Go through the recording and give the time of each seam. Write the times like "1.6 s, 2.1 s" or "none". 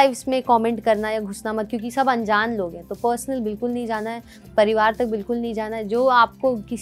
none